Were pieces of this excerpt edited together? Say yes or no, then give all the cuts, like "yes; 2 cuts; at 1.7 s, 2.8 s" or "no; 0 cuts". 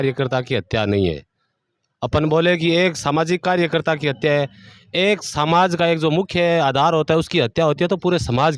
no; 0 cuts